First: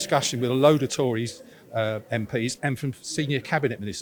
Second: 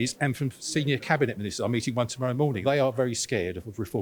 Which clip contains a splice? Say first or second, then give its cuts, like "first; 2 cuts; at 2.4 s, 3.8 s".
second; 1 cut; at 2.6 s